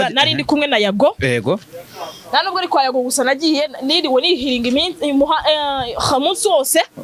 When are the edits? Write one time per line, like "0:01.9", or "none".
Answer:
none